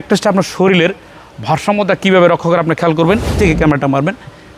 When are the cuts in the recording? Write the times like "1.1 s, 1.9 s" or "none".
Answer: 3.3 s

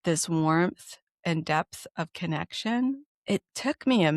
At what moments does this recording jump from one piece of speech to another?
3.1 s

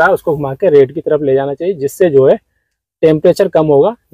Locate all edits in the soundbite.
none

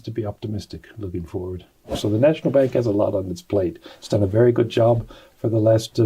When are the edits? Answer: 1.9 s

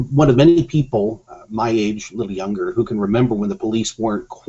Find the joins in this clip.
2.9 s

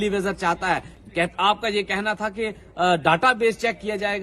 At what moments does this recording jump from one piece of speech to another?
1.0 s

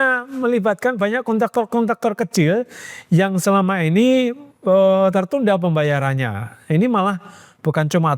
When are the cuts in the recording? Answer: none

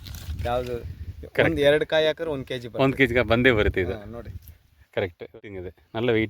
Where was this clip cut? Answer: 5.4 s

